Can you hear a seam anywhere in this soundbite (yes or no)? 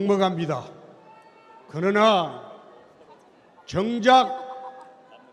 yes